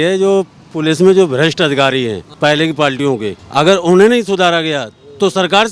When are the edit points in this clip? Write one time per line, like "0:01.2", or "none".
0:02.2
0:03.4

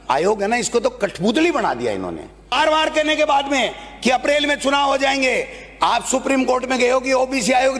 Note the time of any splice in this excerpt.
0:02.5

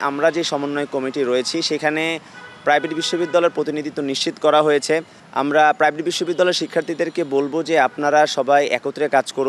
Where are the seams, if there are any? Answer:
0:05.2

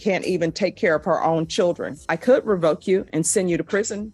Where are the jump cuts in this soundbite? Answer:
0:02.0

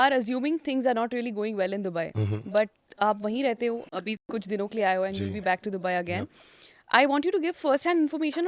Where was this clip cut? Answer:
none

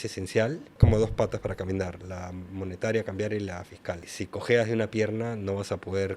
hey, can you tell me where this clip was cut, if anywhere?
none

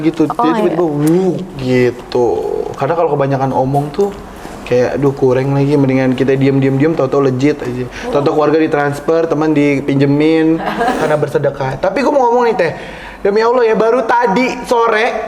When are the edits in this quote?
0:11.0

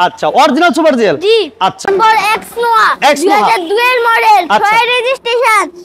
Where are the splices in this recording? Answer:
0:01.8

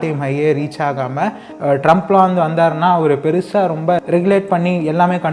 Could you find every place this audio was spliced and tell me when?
0:01.5
0:04.0

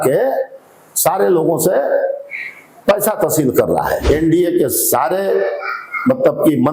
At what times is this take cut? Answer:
0:04.0

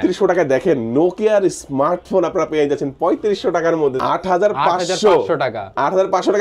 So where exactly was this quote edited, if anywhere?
0:03.9

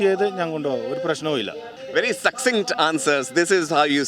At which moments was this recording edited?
none

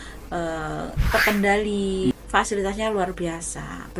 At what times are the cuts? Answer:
0:02.1

